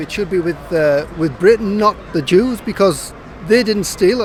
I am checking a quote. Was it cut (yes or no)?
no